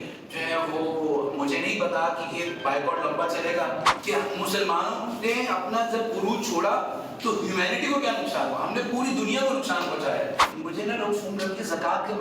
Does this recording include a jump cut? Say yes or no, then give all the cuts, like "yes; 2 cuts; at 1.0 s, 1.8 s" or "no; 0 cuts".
yes; 2 cuts; at 3.9 s, 10.5 s